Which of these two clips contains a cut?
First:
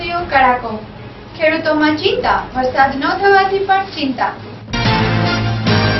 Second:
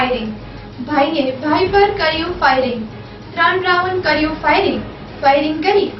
first; 1 cut; at 4.5 s

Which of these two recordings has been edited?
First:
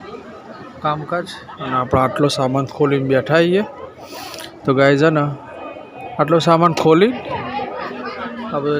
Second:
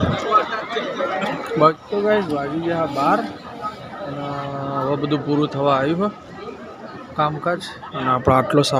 second; 1 cut; at 1.7 s

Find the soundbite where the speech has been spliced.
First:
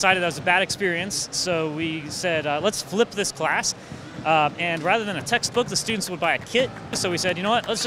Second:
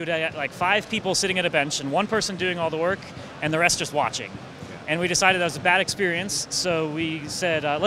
first; 2 cuts; at 3.8 s, 6.9 s

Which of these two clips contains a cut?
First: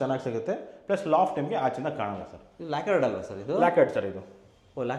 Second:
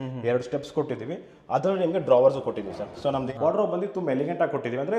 second; 1 cut; at 3.3 s

